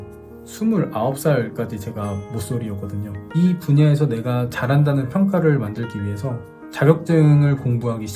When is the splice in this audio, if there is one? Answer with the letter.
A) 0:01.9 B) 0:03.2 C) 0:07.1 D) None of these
B